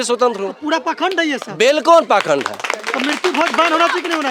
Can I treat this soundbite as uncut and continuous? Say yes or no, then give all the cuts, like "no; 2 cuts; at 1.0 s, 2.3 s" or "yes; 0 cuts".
yes; 0 cuts